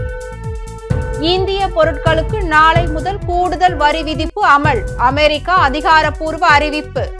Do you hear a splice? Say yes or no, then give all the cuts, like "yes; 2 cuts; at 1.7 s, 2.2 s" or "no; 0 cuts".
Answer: no; 0 cuts